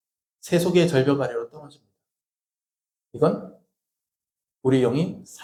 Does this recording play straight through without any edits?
yes; 0 cuts

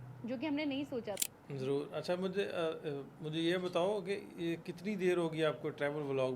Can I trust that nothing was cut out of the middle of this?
no; 1 cut; at 1.2 s

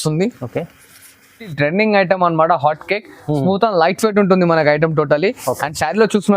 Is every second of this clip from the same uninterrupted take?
no; 1 cut; at 1.5 s

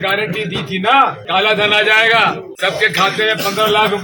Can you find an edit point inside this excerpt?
yes; 2 cuts; at 1.2 s, 2.5 s

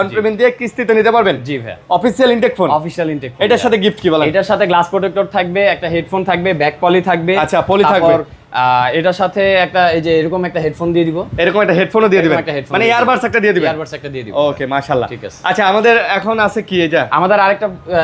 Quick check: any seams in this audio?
no; 0 cuts

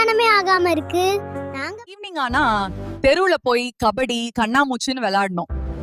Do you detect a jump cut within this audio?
yes; 1 cut; at 1.9 s

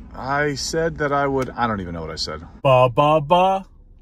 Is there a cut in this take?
yes; 1 cut; at 2.9 s

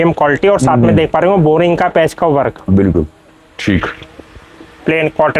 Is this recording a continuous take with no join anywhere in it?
yes; 0 cuts

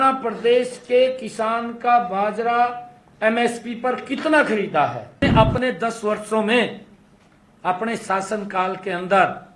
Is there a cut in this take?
yes; 1 cut; at 5.2 s

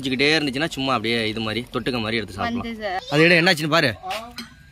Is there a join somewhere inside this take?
yes; 1 cut; at 3.0 s

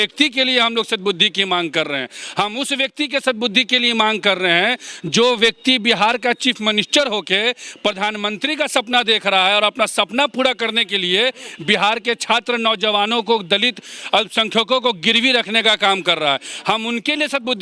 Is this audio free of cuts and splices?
yes; 0 cuts

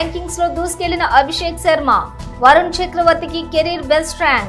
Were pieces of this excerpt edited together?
no; 0 cuts

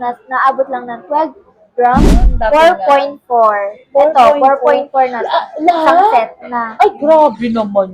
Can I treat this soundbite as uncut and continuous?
no; 1 cut; at 2.3 s

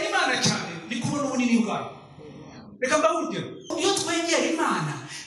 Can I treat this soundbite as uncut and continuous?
no; 1 cut; at 3.7 s

